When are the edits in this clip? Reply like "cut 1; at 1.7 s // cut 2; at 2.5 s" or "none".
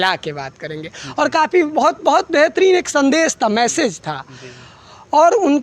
none

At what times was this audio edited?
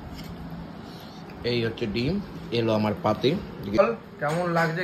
cut 1; at 3.8 s

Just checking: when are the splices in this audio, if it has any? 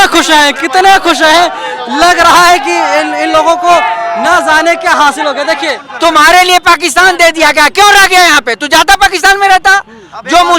cut 1; at 5.8 s

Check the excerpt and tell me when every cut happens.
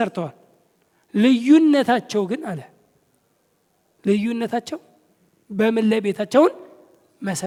none

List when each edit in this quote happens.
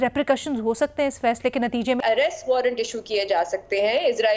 cut 1; at 2.0 s

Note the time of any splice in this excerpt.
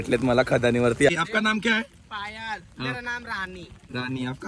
cut 1; at 1.1 s

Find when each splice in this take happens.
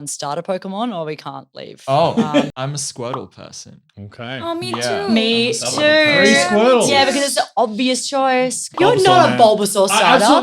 cut 1; at 2.5 s // cut 2; at 8.7 s

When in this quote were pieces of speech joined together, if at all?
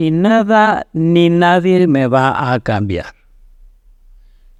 none

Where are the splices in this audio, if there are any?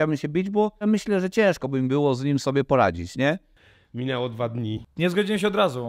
cut 1; at 0.8 s // cut 2; at 3.8 s // cut 3; at 4.9 s

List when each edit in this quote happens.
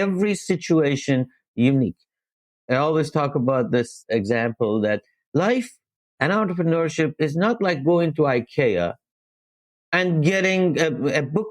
cut 1; at 2.5 s // cut 2; at 4.0 s

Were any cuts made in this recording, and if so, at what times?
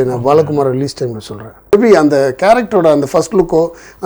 cut 1; at 1.7 s

